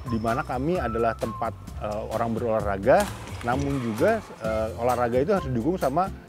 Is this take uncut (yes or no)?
yes